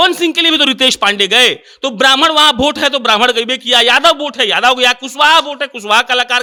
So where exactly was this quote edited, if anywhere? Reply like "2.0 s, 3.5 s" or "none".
none